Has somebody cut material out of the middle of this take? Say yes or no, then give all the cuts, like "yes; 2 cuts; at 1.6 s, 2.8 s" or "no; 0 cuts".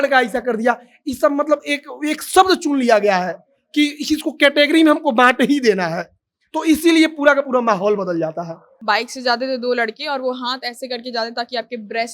yes; 1 cut; at 8.7 s